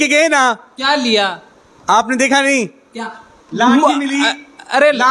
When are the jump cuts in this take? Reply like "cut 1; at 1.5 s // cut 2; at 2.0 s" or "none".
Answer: none